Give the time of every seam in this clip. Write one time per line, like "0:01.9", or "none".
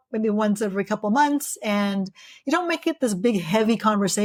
none